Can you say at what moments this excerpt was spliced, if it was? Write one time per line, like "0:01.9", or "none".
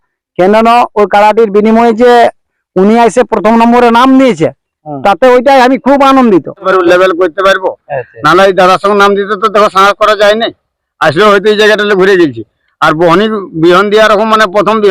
0:06.7